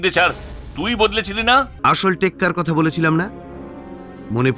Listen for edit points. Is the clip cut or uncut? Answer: cut